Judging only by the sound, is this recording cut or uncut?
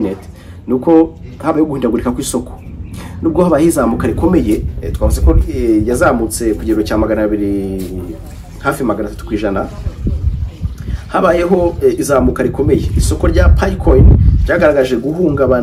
uncut